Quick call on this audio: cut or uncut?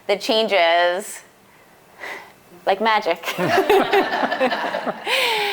uncut